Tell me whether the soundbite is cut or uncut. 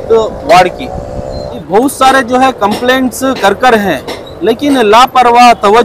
cut